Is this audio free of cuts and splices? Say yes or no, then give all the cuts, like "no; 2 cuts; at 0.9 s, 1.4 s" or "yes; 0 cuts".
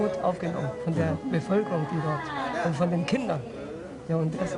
yes; 0 cuts